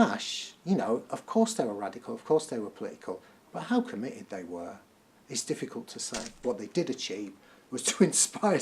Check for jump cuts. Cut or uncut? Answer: cut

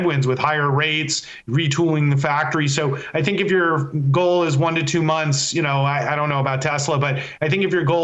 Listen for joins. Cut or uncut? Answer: uncut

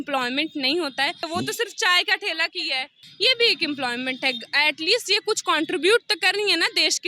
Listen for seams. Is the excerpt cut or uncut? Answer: cut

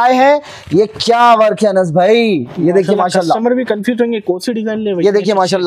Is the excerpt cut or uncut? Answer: uncut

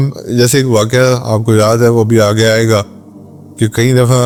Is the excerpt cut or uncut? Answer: uncut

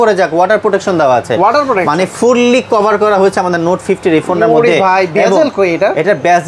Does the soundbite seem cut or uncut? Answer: uncut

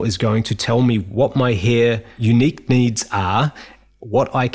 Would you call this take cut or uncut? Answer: cut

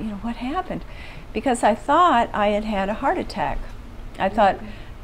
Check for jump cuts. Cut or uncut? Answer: uncut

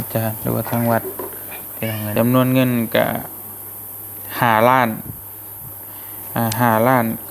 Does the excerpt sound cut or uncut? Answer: cut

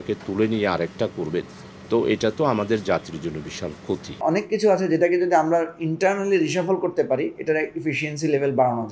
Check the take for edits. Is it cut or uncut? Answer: cut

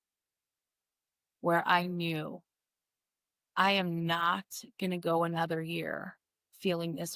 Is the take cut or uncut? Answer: uncut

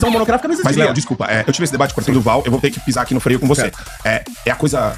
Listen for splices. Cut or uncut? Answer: uncut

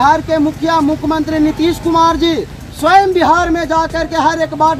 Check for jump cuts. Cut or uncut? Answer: uncut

